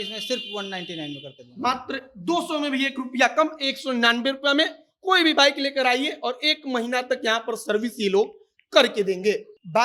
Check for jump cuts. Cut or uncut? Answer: uncut